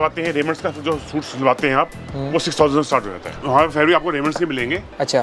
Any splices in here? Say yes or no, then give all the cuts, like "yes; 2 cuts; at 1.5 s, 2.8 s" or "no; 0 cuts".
yes; 1 cut; at 3.3 s